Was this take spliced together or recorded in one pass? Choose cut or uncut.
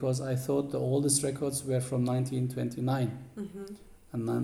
uncut